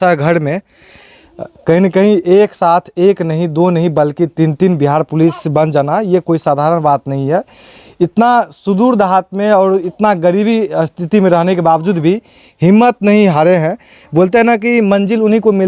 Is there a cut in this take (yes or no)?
no